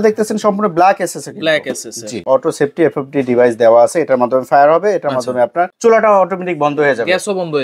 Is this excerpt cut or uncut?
cut